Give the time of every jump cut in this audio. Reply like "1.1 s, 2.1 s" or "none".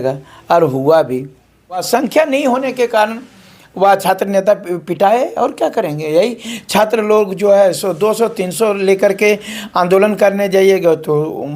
1.8 s

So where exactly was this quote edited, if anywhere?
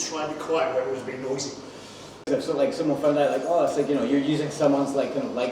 2.3 s

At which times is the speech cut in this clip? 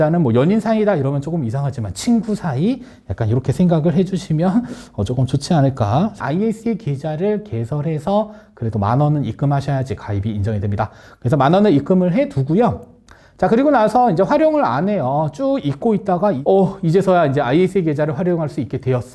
6.2 s, 16.4 s

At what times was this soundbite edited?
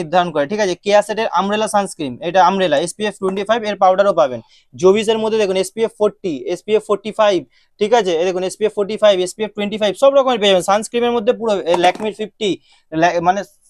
none

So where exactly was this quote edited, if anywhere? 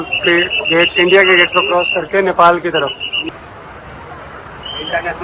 3.2 s

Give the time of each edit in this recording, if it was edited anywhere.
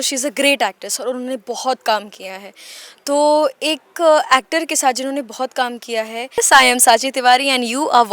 6.4 s

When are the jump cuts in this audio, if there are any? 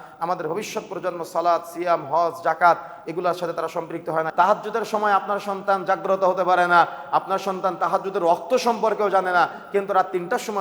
4.3 s

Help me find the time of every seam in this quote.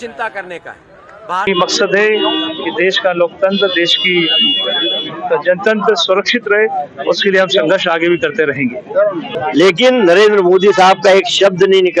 1.5 s, 9.3 s

